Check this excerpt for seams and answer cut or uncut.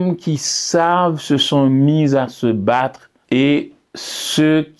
cut